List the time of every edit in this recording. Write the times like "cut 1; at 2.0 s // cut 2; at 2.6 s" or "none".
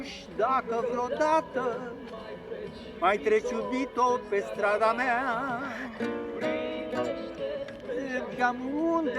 none